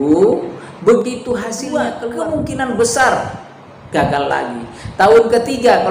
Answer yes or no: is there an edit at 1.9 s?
yes